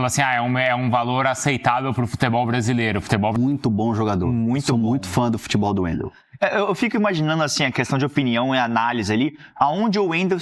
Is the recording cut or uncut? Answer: cut